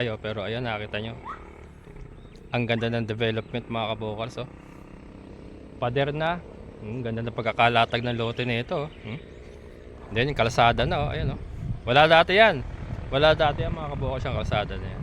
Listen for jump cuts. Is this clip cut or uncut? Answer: uncut